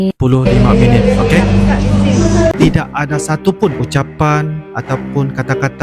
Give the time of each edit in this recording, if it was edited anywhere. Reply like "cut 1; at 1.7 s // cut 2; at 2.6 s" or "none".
cut 1; at 2.5 s